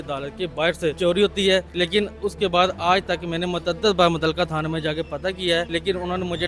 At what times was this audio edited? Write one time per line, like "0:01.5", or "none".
0:01.0
0:01.7
0:05.7